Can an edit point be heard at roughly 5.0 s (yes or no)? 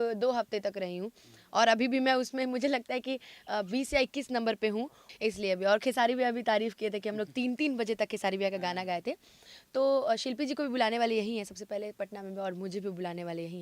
yes